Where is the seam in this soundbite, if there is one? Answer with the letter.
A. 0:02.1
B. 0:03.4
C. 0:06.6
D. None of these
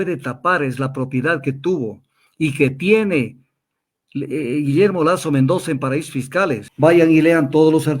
C